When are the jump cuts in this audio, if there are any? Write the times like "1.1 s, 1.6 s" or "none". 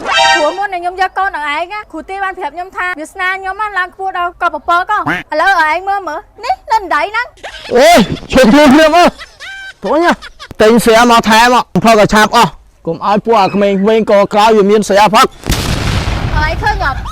1.8 s, 2.9 s, 10.6 s, 11.8 s